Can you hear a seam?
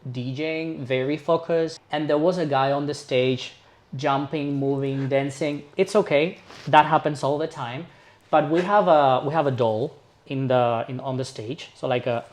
yes; 1 cut; at 1.8 s

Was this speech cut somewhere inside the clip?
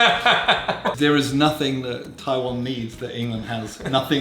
yes; 1 cut; at 0.9 s

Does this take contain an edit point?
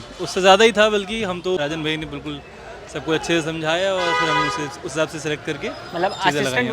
yes; 1 cut; at 1.6 s

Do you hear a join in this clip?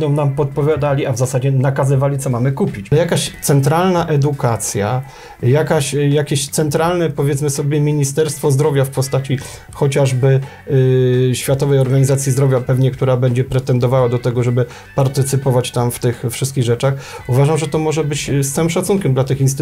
yes; 1 cut; at 2.9 s

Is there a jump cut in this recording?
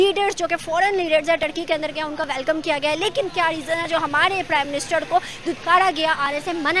no; 0 cuts

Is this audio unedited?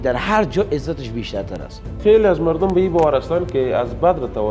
no; 1 cut; at 2.0 s

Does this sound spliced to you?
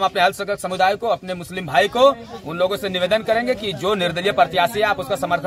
no; 0 cuts

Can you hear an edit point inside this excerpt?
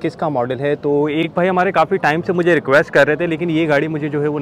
no; 0 cuts

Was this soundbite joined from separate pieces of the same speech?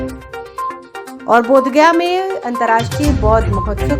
yes; 1 cut; at 1.1 s

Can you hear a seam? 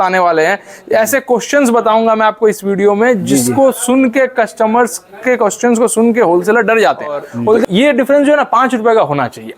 yes; 1 cut; at 7.6 s

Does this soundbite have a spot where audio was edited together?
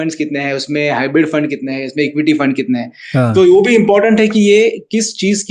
no; 0 cuts

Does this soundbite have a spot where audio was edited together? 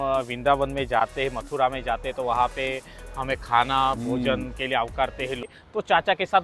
yes; 1 cut; at 5.4 s

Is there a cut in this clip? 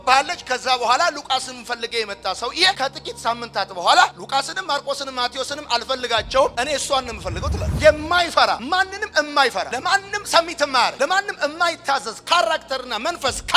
yes; 1 cut; at 7.7 s

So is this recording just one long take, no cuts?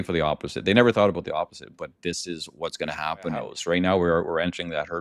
no; 1 cut; at 3.5 s

